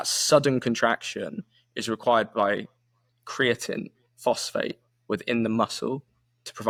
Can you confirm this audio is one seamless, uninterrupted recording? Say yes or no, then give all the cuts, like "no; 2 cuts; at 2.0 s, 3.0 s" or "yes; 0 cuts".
yes; 0 cuts